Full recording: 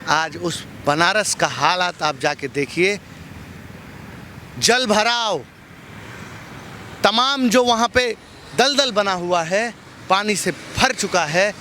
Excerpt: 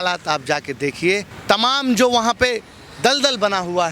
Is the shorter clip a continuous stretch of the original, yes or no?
no